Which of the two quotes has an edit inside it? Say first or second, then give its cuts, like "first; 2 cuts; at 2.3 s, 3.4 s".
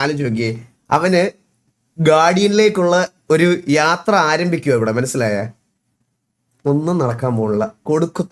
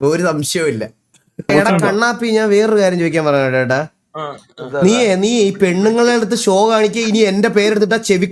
second; 1 cut; at 1.5 s